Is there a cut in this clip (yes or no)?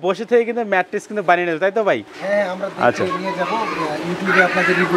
no